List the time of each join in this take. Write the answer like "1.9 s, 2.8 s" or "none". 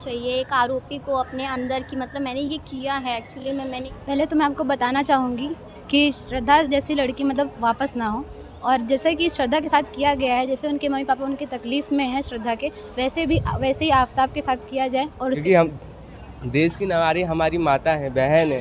3.8 s, 15.4 s